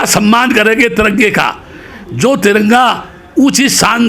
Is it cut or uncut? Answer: uncut